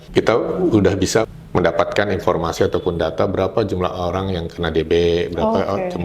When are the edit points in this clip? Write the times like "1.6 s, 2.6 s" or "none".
1.3 s